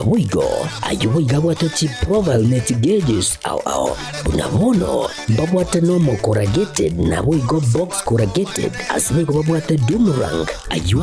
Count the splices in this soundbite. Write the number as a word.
one